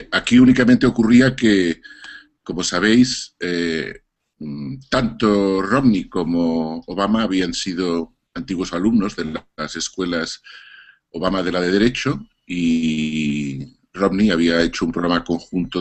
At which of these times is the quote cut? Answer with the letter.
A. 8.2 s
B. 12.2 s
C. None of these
C